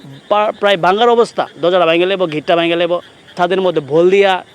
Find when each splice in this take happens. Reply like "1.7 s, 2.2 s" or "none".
3.3 s